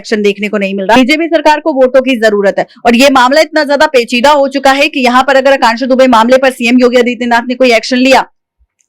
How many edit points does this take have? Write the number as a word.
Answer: one